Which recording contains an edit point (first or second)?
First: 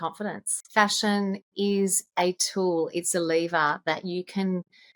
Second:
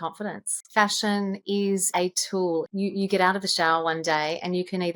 second